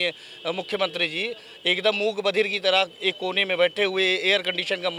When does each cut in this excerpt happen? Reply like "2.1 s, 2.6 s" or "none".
none